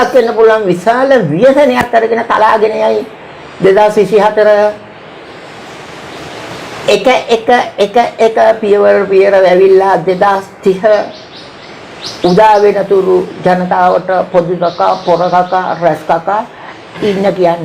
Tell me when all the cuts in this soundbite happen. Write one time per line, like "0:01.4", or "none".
none